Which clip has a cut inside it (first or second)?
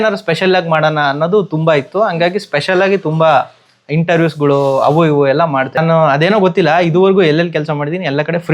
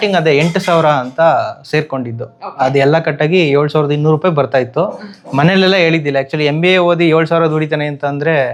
first